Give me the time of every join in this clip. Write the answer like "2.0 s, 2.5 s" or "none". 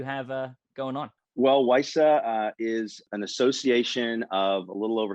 1.2 s, 3.0 s